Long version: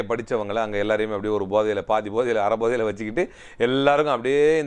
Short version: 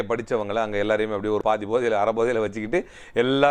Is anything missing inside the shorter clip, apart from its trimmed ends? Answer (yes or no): yes